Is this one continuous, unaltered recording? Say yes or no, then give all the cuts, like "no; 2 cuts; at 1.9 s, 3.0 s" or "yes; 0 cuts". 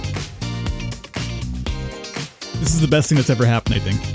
yes; 0 cuts